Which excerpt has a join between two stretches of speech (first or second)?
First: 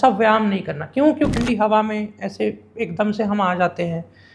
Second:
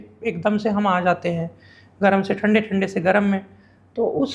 first